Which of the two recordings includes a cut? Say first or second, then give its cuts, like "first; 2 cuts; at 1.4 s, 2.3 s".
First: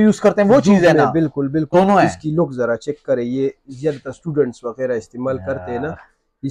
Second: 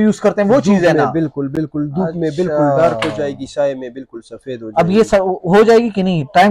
first; 1 cut; at 1.6 s